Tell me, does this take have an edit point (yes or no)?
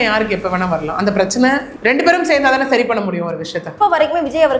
yes